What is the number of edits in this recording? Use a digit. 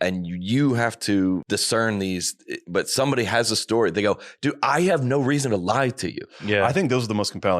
1